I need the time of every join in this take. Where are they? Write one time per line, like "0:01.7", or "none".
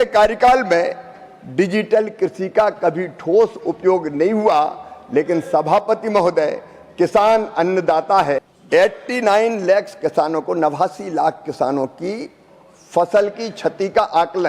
0:08.5